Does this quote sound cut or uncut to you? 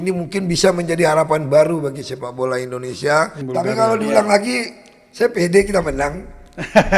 cut